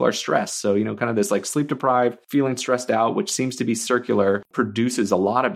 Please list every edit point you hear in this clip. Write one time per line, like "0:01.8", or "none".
0:02.2
0:04.5